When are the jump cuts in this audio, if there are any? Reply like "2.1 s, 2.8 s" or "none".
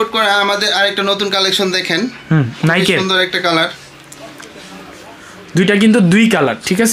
none